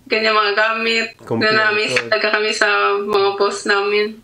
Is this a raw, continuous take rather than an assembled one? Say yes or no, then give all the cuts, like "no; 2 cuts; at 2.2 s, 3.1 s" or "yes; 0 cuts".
yes; 0 cuts